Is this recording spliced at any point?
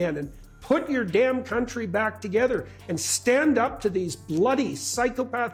no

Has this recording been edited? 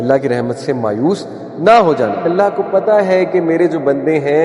yes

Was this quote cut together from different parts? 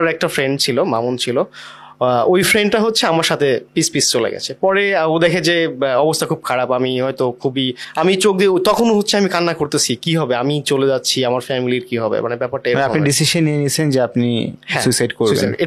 no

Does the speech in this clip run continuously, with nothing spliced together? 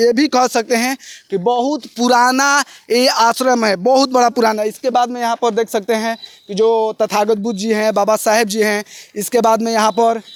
yes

